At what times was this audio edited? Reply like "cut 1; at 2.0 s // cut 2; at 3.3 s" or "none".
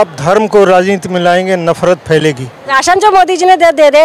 cut 1; at 2.6 s